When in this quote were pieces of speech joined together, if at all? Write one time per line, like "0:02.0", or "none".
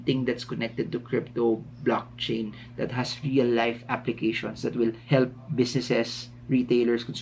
0:05.0